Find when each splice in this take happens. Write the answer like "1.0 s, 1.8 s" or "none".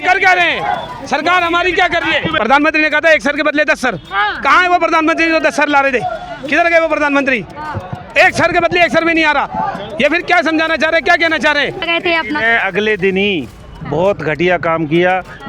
2.3 s, 11.8 s